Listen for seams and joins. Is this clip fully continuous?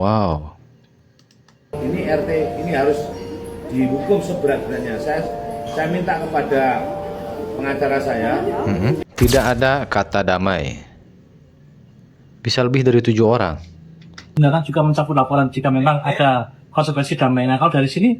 no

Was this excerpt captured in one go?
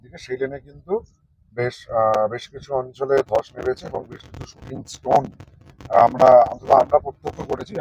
yes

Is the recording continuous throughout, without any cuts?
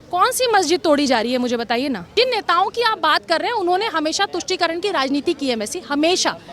no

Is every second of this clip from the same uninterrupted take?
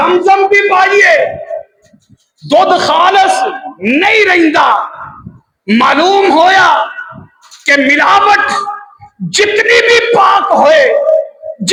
yes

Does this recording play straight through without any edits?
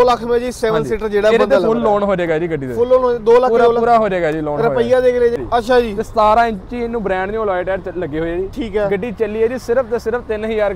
no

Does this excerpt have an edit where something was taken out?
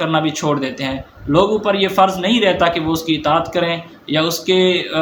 no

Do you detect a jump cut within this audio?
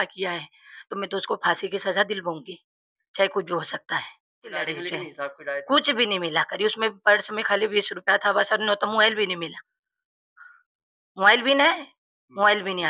yes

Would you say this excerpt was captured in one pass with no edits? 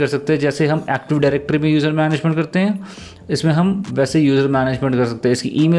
yes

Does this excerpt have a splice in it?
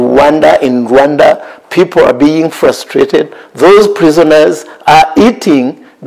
no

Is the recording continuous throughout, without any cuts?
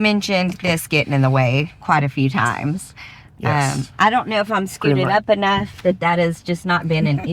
yes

